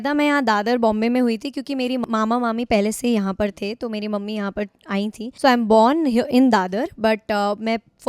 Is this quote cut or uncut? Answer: cut